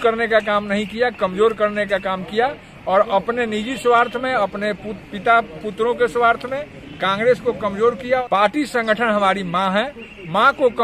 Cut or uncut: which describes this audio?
cut